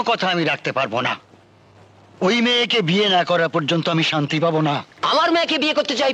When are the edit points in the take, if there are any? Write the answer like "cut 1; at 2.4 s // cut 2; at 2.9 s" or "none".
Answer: cut 1; at 4.9 s